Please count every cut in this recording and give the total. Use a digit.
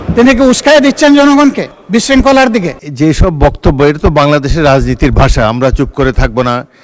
2